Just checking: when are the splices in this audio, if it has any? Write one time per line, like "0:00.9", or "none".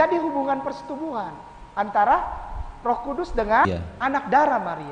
0:03.7